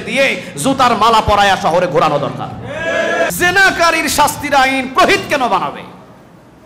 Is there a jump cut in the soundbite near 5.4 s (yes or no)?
no